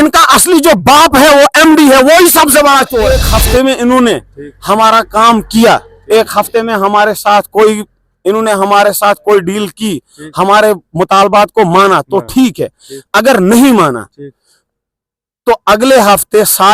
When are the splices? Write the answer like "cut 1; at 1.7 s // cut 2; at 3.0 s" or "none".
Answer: cut 1; at 3.2 s